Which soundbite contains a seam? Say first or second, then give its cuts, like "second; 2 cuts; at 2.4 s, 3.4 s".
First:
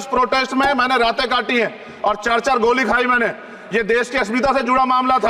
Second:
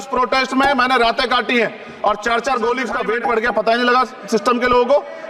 second; 1 cut; at 2.9 s